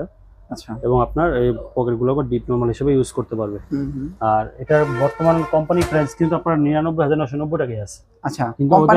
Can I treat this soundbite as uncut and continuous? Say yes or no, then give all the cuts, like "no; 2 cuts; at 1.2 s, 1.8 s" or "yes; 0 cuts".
yes; 0 cuts